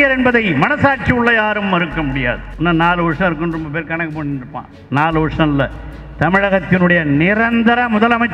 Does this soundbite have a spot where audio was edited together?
yes; 1 cut; at 2.5 s

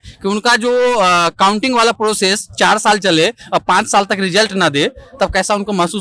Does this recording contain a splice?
no; 0 cuts

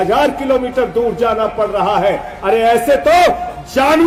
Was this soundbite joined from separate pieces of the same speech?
no; 0 cuts

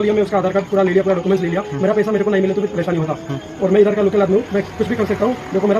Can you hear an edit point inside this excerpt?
no; 0 cuts

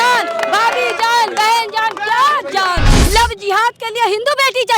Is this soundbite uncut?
no; 1 cut; at 3.0 s

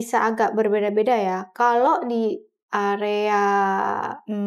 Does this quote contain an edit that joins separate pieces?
no; 0 cuts

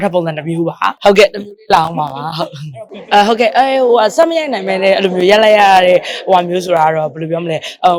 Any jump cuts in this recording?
no; 0 cuts

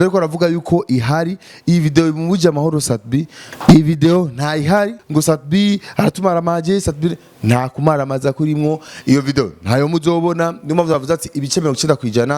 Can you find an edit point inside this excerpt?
yes; 2 cuts; at 3.4 s, 5.0 s

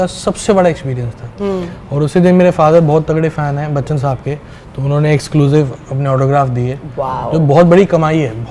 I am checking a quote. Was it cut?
no; 0 cuts

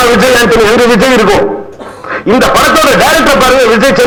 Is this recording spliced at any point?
no; 0 cuts

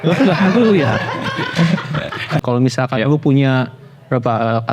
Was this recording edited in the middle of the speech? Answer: yes; 1 cut; at 2.4 s

